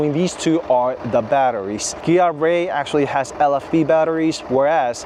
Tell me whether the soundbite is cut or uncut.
uncut